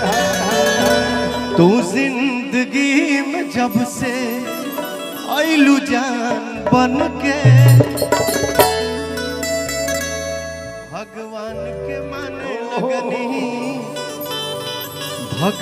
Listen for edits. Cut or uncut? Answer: uncut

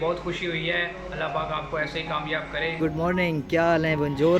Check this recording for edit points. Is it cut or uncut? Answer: cut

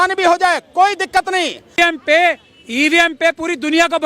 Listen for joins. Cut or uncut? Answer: cut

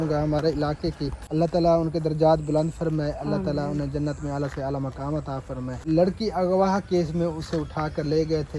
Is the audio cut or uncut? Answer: cut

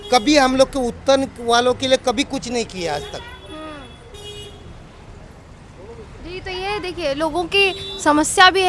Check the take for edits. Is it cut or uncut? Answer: uncut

